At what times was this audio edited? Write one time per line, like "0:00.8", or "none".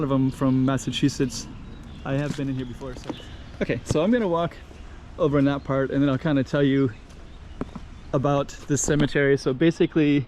0:02.9